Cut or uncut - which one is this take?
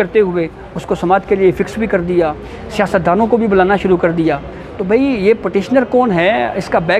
uncut